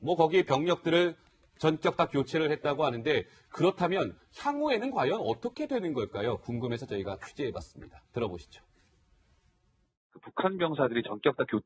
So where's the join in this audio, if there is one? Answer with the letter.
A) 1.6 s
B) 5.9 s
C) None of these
B